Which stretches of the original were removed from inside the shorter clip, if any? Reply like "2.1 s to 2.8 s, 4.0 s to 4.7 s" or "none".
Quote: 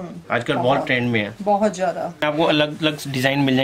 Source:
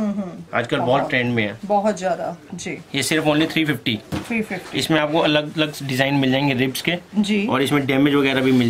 2.5 s to 5.0 s